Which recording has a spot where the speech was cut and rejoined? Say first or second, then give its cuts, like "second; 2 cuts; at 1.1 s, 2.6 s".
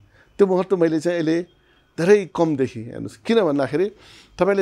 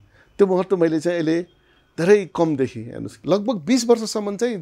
second; 1 cut; at 3.1 s